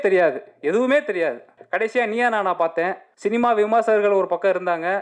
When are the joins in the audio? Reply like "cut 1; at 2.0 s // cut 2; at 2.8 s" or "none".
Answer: cut 1; at 1.5 s // cut 2; at 3.0 s